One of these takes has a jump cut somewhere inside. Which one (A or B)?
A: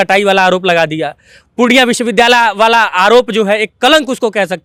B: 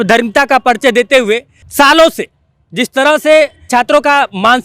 B